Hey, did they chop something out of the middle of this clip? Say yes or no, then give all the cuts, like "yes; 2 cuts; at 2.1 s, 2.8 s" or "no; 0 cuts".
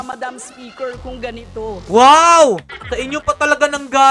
yes; 2 cuts; at 1.8 s, 2.7 s